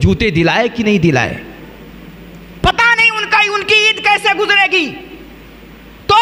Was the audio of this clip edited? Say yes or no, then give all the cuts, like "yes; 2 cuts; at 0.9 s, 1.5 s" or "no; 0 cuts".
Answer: no; 0 cuts